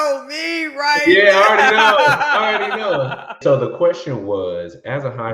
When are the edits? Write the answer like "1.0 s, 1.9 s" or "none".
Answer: 3.4 s